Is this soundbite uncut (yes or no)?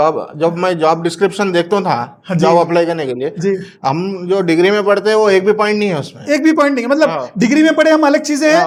yes